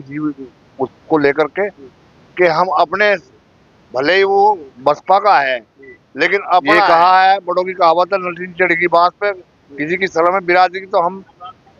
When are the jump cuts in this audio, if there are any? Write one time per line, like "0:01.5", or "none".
0:06.9

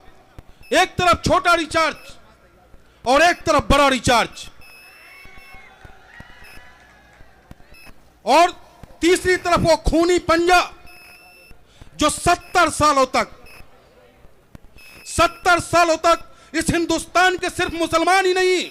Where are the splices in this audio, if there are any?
none

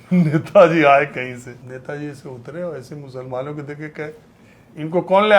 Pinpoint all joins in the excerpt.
0:01.6

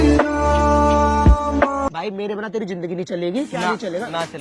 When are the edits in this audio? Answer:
0:01.9

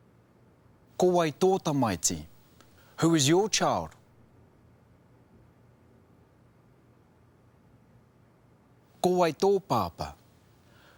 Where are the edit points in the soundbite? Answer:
none

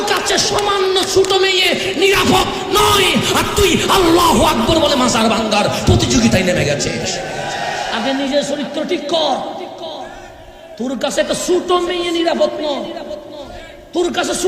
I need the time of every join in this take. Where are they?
none

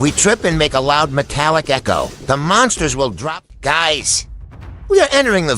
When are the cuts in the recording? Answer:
0:03.3

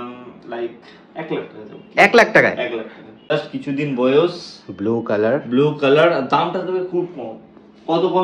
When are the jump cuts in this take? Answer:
0:03.3

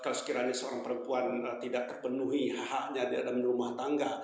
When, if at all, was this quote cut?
none

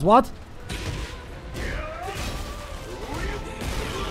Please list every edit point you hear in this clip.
none

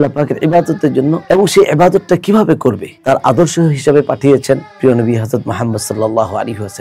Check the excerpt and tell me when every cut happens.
0:01.2
0:02.9

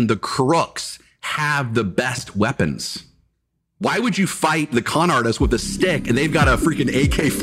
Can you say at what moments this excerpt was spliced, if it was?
none

